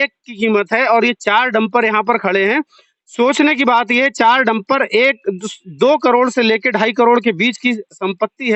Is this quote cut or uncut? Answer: uncut